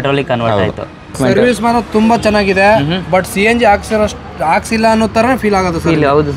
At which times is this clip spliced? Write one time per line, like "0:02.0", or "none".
0:01.2